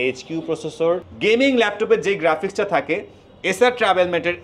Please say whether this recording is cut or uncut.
cut